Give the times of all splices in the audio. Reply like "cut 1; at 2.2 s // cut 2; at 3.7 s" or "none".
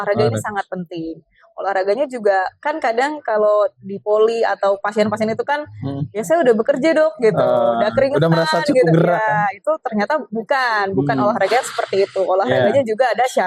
none